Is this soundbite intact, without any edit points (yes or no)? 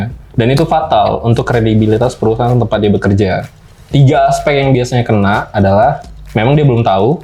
yes